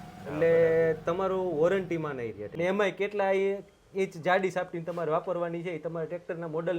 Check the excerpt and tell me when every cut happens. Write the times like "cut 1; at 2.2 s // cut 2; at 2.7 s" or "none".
cut 1; at 2.4 s